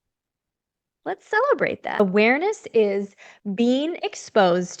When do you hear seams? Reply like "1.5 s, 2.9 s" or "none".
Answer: 2.0 s